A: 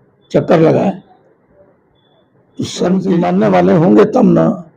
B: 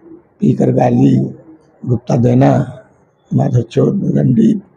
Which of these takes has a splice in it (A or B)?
A